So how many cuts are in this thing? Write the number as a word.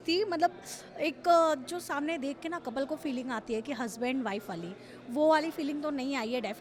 zero